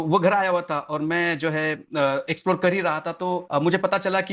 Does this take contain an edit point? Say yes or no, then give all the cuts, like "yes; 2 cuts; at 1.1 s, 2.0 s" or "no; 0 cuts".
no; 0 cuts